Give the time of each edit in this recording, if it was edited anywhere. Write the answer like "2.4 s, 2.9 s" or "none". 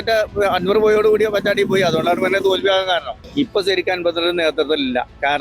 3.2 s